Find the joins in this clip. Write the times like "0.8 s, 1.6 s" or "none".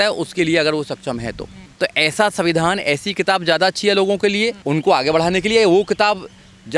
1.6 s, 4.6 s